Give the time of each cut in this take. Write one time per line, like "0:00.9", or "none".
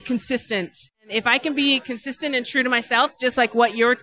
0:01.1